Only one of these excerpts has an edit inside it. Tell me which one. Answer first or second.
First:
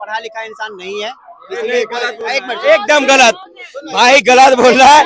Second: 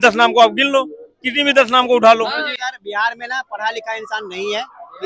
second